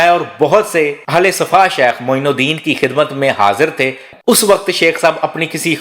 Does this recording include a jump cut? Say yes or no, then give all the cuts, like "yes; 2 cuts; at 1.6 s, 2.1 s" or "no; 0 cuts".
yes; 1 cut; at 4.1 s